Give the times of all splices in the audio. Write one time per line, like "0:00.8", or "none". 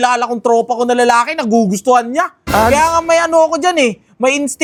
none